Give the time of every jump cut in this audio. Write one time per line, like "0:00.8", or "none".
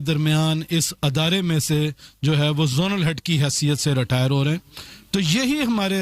none